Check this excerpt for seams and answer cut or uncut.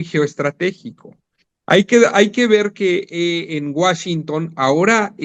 uncut